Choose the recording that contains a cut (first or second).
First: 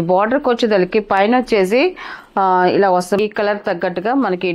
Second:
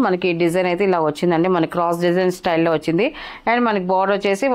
first